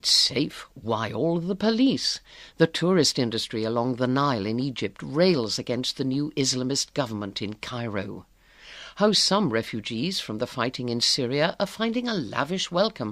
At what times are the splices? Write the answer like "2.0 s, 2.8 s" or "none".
none